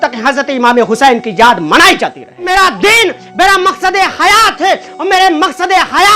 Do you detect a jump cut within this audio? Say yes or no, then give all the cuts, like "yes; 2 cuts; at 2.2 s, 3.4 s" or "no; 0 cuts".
yes; 1 cut; at 2.5 s